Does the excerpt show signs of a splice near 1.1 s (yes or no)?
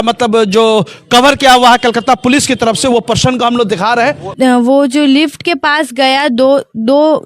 no